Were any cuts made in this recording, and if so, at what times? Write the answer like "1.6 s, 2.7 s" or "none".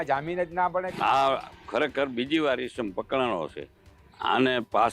0.9 s

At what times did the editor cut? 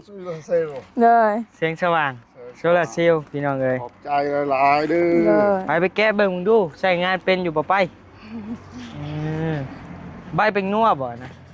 none

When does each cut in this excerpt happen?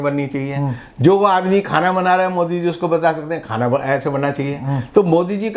none

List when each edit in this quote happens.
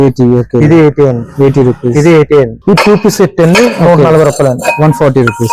2.5 s

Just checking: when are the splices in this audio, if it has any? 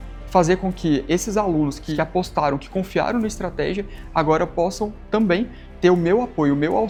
none

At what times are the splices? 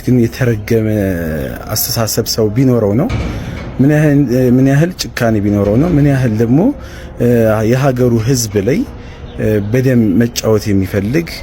none

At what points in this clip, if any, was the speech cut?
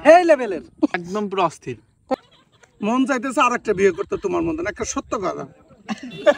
1.0 s, 2.1 s

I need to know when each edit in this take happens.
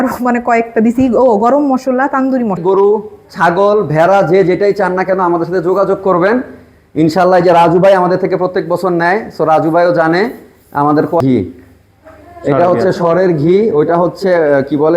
2.6 s, 11.2 s

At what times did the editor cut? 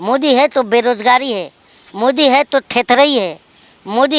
none

